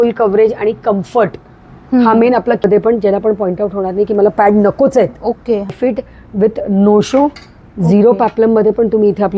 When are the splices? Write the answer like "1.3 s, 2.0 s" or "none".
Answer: 2.6 s, 5.7 s